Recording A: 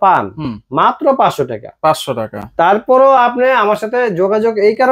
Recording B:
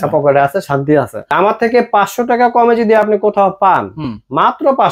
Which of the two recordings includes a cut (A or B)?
B